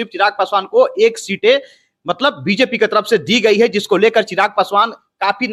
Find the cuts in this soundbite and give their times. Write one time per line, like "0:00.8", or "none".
none

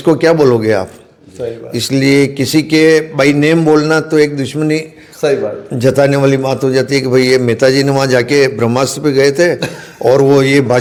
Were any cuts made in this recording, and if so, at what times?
none

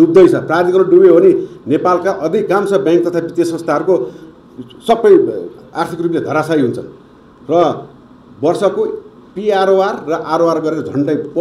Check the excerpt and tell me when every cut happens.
none

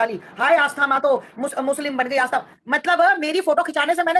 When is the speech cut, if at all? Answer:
none

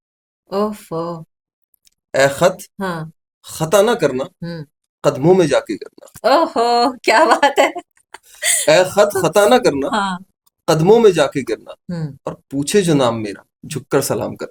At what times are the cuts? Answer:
none

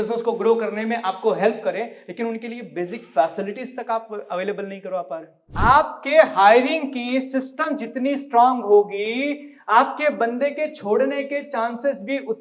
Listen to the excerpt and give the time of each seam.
0:05.4

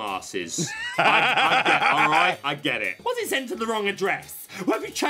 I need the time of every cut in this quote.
0:03.0

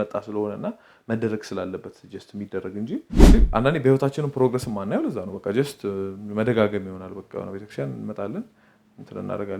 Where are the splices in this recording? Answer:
0:03.3

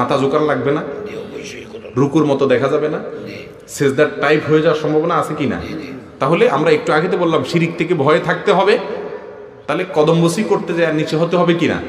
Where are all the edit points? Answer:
none

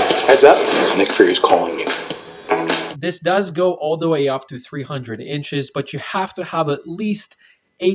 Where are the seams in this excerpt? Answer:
0:02.9

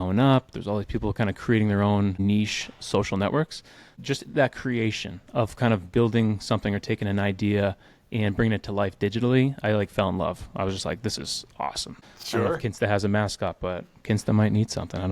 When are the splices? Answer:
0:02.2
0:04.0
0:11.9

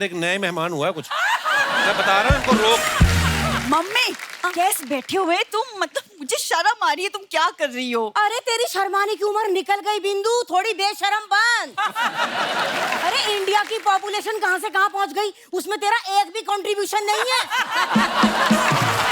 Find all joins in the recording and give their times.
0:03.6
0:13.0

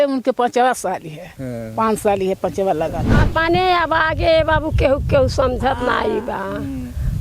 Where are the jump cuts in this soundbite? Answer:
0:03.2

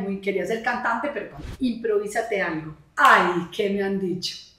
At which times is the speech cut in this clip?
0:01.4

